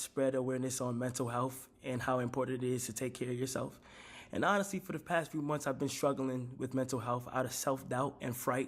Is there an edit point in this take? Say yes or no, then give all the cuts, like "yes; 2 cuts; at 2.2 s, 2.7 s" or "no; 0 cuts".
yes; 1 cut; at 3.5 s